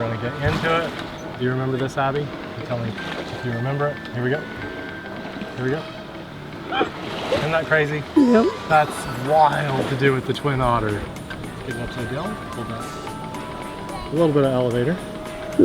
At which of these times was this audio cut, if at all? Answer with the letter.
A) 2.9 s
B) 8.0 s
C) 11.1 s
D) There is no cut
C